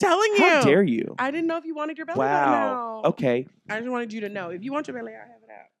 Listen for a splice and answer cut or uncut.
uncut